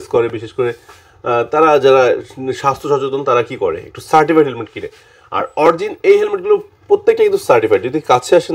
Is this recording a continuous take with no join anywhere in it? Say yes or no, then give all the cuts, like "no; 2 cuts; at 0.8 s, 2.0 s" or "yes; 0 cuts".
yes; 0 cuts